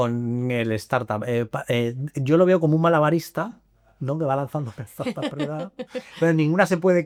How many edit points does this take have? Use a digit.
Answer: 0